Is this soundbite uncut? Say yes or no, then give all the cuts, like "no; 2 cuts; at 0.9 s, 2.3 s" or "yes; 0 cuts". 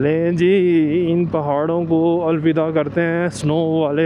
yes; 0 cuts